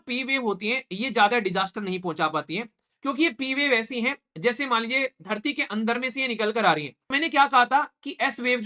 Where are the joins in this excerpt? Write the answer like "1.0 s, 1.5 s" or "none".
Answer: 7.0 s